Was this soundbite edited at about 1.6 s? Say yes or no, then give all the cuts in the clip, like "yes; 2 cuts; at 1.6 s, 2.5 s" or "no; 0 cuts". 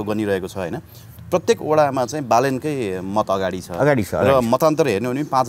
no; 0 cuts